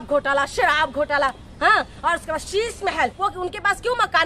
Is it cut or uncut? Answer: cut